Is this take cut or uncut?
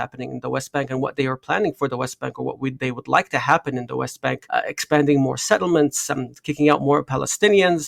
uncut